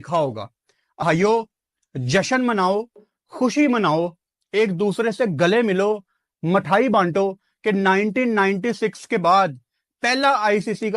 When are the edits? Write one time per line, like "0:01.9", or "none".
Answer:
0:00.9